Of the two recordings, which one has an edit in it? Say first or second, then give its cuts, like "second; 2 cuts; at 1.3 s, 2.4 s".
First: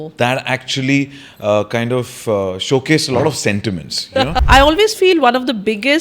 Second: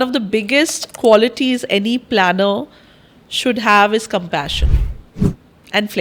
first; 1 cut; at 4.4 s